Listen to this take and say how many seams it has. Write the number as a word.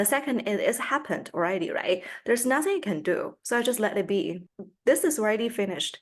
one